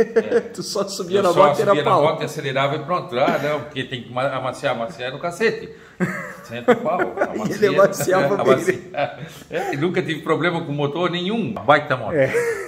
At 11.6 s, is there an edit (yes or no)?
yes